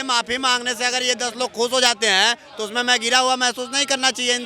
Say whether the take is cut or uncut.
uncut